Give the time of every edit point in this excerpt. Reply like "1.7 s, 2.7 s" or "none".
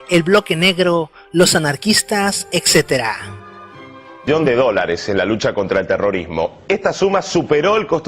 2.0 s